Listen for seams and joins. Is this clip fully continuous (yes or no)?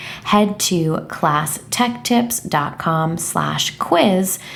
yes